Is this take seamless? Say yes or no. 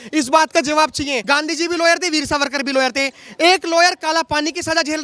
no